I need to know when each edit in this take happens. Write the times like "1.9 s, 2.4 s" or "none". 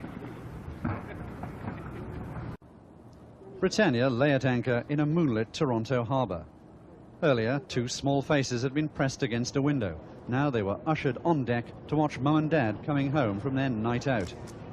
1.7 s

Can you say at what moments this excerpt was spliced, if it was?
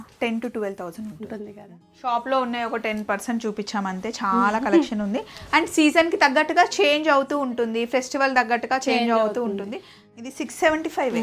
1.9 s, 9.9 s

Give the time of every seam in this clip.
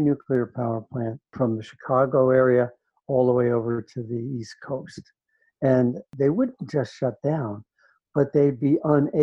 1.2 s, 6.1 s

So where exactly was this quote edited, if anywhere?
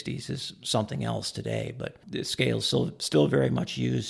2.0 s

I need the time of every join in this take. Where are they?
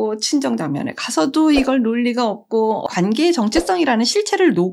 2.9 s

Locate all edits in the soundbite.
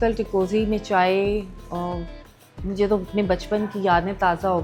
none

